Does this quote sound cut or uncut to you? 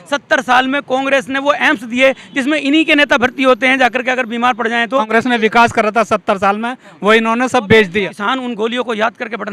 cut